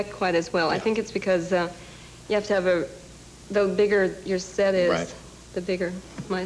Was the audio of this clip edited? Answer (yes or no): no